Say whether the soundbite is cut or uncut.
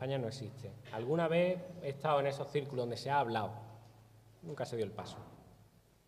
cut